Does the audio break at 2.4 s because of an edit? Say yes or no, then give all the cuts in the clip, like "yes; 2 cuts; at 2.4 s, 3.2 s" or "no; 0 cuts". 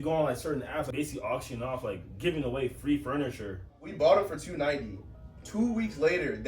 no; 2 cuts; at 0.9 s, 3.9 s